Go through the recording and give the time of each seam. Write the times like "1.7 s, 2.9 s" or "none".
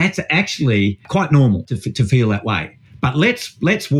1.0 s, 1.7 s